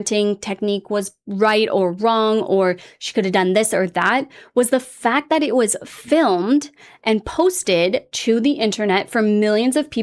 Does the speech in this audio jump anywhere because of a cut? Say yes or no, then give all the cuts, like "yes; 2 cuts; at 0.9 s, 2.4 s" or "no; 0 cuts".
no; 0 cuts